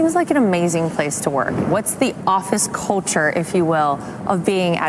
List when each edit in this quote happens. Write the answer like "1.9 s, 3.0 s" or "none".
none